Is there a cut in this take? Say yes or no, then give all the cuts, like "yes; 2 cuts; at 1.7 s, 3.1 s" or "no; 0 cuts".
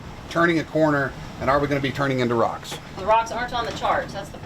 yes; 1 cut; at 2.8 s